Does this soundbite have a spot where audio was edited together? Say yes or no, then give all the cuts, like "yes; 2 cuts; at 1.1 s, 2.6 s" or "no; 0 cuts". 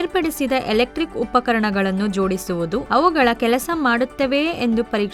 no; 0 cuts